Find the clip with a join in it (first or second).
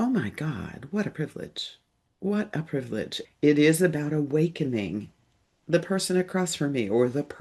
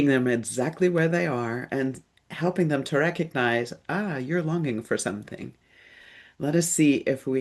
first